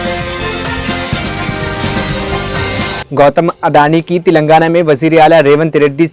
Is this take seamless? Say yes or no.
no